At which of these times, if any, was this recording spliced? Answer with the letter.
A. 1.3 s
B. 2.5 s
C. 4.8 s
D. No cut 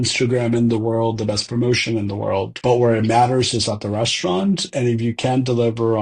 B